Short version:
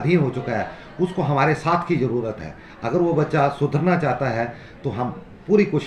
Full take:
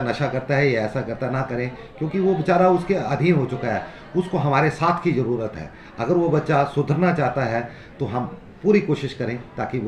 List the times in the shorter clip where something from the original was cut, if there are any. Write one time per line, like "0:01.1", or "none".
none